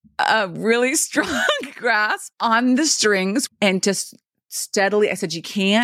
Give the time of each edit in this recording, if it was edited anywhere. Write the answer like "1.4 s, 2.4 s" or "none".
2.3 s, 3.4 s